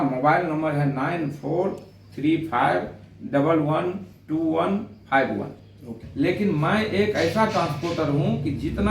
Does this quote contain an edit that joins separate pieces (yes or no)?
yes